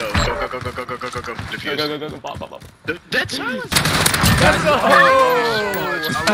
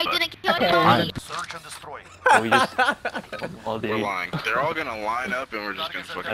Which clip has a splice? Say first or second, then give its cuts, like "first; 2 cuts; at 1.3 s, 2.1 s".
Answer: first; 1 cut; at 3.7 s